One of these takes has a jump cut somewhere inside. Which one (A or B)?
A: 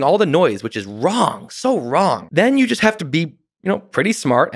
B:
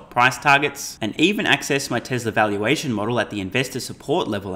A